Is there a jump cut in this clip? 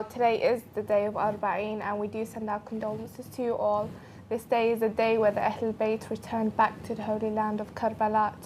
yes; 1 cut; at 7.0 s

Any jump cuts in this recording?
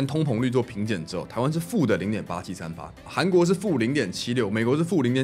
yes; 1 cut; at 3.1 s

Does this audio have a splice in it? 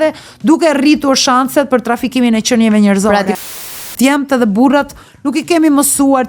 yes; 1 cut; at 3.7 s

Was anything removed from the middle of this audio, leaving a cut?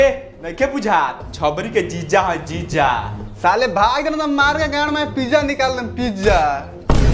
no; 0 cuts

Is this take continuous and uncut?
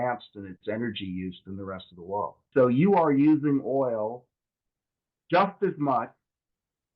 no; 1 cut; at 2.4 s

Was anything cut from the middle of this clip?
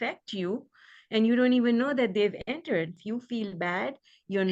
yes; 1 cut; at 3.0 s

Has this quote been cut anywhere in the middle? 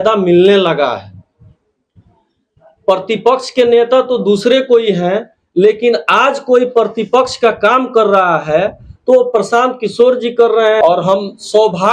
yes; 1 cut; at 10.8 s

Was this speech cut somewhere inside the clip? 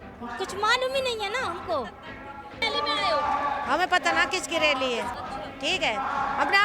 yes; 2 cuts; at 2.6 s, 5.2 s

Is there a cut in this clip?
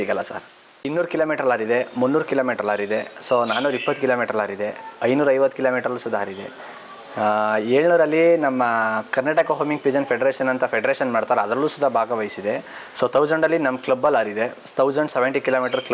yes; 1 cut; at 0.9 s

